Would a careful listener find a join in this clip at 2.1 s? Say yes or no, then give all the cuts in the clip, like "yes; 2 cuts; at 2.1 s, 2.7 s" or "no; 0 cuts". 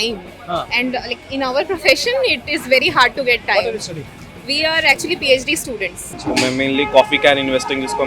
no; 1 cut; at 6.1 s